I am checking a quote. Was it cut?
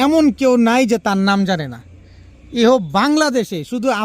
no; 0 cuts

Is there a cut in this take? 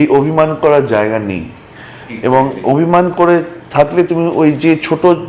no; 0 cuts

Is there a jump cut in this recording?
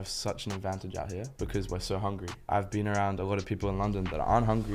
yes; 2 cuts; at 1.3 s, 2.5 s

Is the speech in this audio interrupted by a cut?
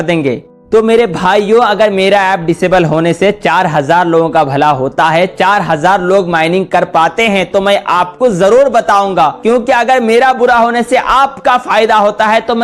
no; 0 cuts

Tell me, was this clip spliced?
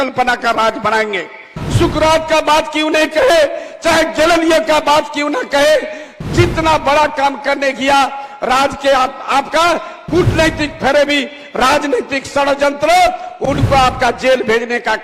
yes; 1 cut; at 1.6 s

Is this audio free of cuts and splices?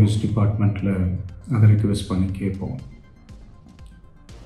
no; 1 cut; at 3.3 s

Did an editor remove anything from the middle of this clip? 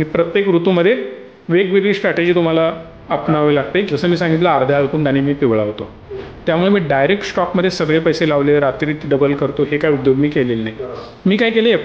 yes; 1 cut; at 3.9 s

